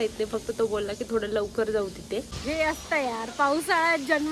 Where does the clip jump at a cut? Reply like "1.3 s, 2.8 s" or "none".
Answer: 2.3 s